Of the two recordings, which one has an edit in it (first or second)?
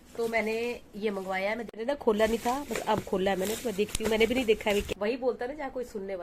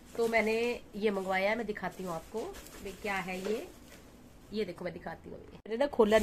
first